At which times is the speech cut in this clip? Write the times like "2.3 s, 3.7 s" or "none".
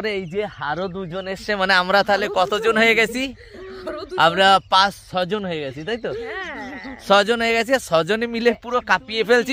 none